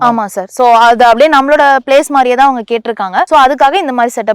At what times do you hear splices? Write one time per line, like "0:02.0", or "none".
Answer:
0:03.3

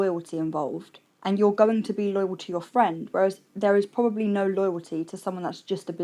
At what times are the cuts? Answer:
none

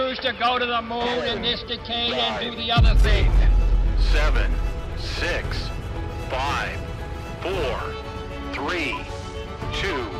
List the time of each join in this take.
none

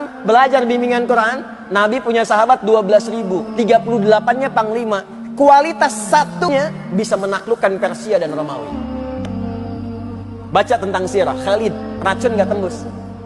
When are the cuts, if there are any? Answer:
0:06.5

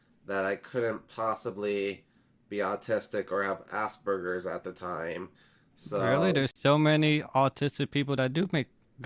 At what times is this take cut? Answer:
none

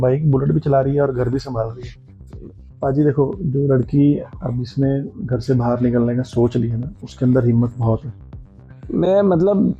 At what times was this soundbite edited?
0:02.4
0:08.8

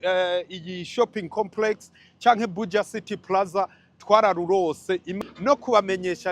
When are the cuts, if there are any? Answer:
0:05.1

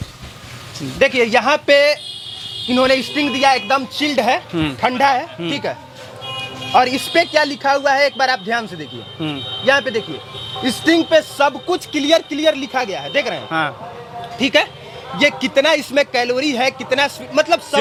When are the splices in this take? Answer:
none

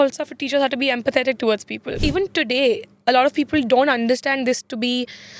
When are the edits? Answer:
0:01.9

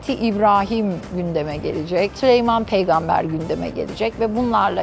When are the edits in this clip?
none

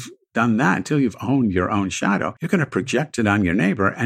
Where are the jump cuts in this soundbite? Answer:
0:02.3

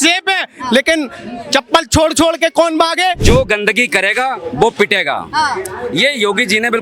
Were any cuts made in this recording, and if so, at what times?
0:03.2

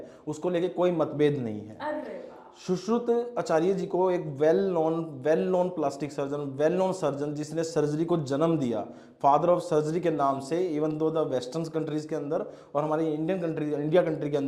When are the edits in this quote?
none

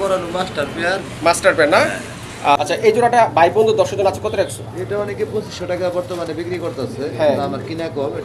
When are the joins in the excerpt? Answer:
0:02.6

